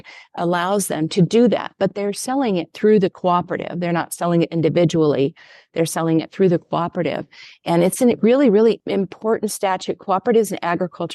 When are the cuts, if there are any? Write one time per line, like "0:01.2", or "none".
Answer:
0:08.8

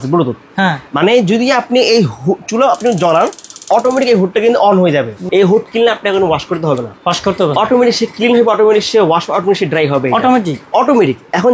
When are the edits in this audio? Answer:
0:05.2

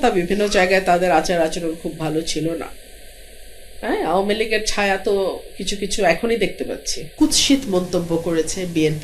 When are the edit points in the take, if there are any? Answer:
0:07.0

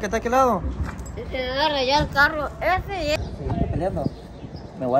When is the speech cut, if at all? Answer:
0:03.2

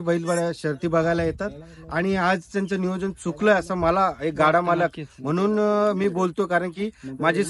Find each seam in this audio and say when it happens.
none

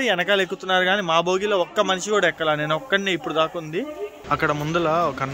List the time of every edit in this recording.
0:04.2

